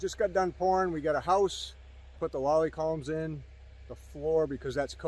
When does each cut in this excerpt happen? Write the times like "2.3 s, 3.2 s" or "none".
2.2 s